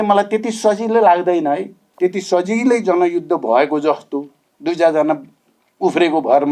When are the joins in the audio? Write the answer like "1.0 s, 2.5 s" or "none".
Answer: 1.8 s